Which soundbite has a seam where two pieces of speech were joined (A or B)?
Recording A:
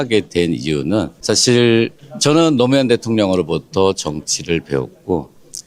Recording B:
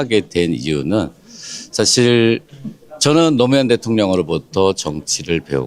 A